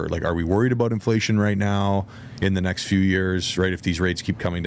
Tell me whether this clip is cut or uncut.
uncut